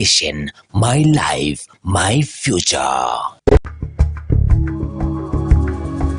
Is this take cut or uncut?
cut